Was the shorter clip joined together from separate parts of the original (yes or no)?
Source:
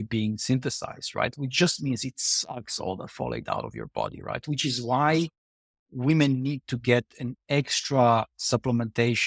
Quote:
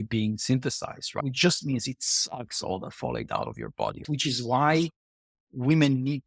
yes